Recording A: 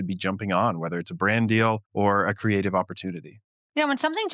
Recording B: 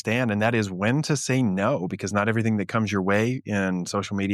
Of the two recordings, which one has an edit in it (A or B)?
A